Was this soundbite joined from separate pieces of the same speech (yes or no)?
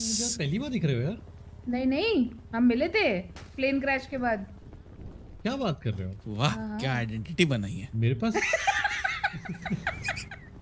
no